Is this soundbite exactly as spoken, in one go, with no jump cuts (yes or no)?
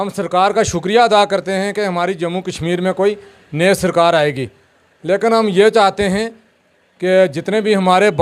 yes